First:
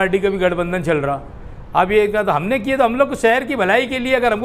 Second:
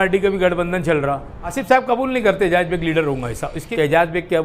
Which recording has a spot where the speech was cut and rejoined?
second; 2 cuts; at 1.6 s, 3.6 s

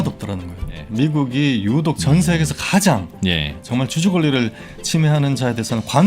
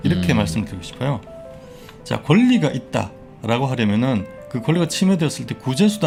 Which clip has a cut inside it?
first; 2 cuts; at 0.8 s, 3.5 s

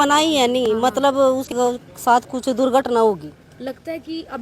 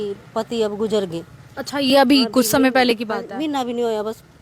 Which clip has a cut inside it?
first; 1 cut; at 1.5 s

